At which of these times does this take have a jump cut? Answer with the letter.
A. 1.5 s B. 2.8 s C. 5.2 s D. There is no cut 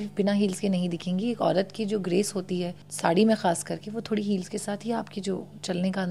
B